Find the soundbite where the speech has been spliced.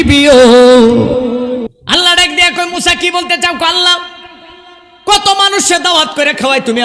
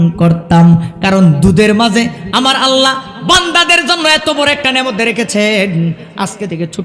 first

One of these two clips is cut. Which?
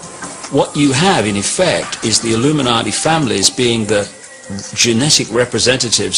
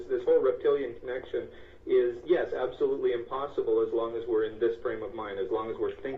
first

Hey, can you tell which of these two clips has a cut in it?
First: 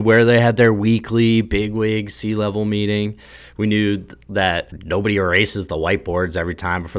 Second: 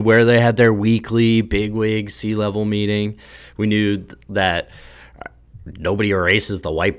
first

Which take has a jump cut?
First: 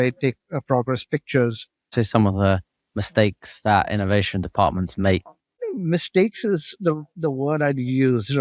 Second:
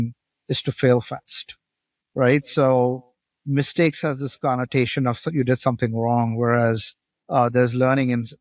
first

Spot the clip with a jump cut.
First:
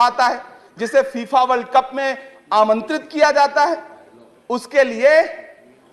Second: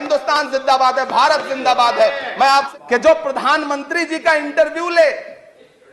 second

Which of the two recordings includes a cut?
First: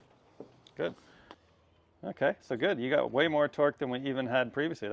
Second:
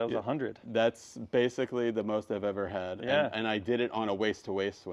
first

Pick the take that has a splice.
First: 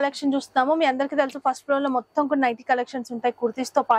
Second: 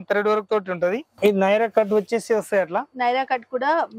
second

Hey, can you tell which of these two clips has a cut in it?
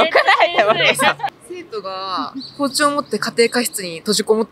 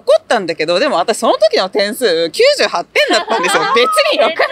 first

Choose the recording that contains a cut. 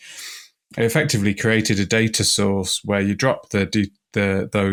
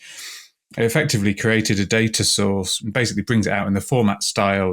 second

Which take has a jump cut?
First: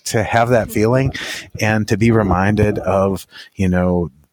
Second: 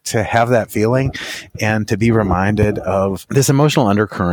second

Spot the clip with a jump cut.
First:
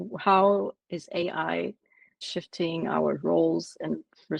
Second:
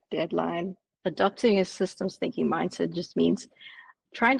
first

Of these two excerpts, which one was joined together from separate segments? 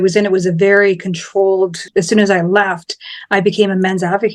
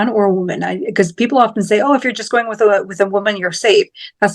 first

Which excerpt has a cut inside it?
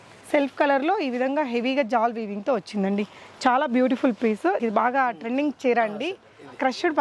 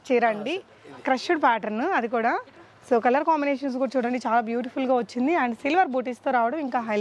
first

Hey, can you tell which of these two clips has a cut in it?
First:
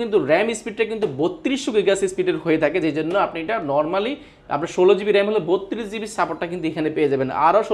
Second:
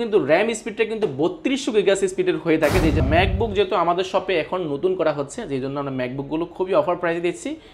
second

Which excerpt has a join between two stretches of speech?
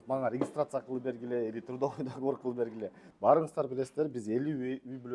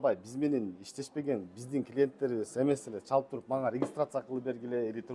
first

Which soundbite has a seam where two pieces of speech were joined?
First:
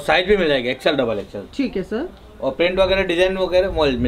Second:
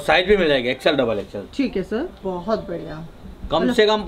second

